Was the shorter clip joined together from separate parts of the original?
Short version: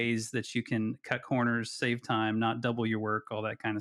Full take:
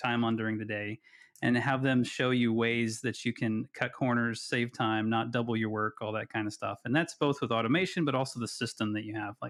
no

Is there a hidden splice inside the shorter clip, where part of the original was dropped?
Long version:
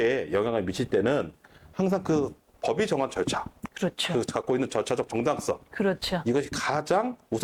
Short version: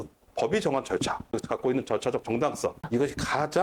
yes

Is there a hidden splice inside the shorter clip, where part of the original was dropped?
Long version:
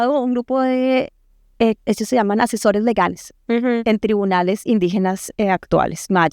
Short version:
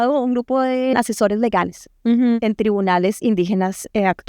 yes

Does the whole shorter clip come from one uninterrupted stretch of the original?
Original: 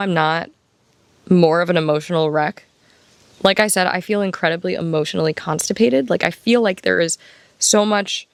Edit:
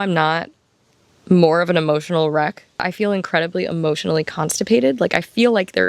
no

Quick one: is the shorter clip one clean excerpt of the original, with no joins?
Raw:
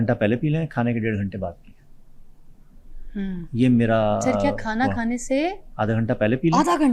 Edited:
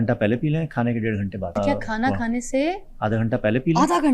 no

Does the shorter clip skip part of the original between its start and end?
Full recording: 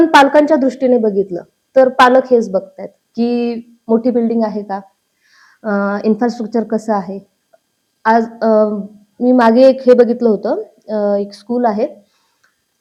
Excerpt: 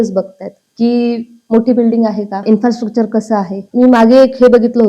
yes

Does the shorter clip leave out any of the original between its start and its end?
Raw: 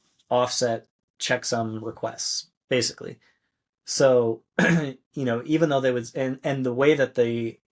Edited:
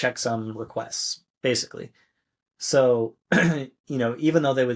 no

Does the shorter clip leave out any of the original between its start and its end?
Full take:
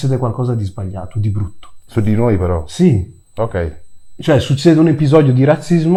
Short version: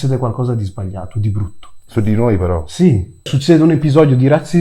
yes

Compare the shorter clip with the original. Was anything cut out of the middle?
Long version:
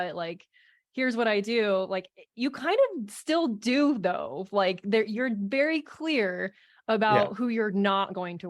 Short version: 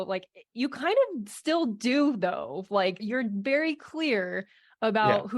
yes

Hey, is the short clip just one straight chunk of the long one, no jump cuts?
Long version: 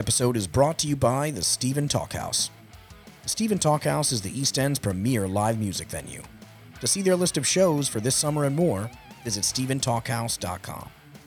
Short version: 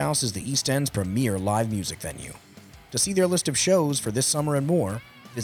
yes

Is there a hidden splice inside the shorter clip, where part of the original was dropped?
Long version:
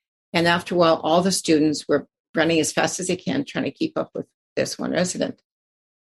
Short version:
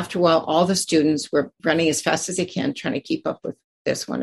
yes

